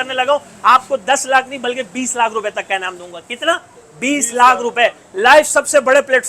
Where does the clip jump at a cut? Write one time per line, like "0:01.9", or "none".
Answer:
none